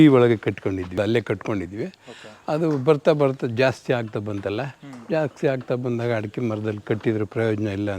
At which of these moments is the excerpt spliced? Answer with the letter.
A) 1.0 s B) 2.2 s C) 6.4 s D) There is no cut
A